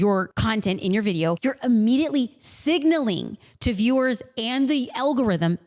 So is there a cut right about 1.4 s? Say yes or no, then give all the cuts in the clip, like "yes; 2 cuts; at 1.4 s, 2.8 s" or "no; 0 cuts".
yes; 1 cut; at 1.4 s